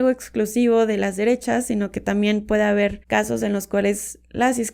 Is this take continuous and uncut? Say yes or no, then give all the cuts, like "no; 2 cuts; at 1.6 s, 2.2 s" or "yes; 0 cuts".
no; 1 cut; at 3.0 s